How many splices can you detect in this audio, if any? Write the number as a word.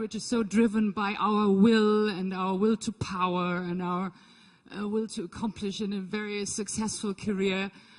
one